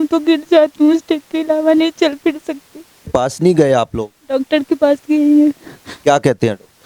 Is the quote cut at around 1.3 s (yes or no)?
no